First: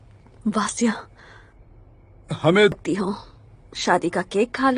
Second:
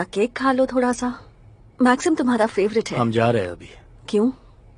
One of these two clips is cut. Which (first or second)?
first